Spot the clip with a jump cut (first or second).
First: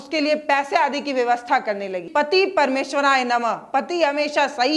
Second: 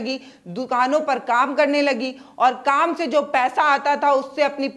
first